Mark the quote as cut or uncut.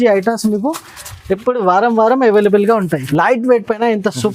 cut